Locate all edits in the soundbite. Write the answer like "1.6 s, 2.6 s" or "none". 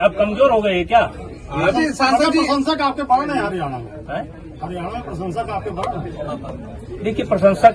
1.7 s